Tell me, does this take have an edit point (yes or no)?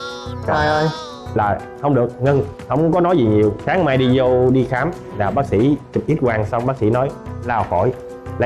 no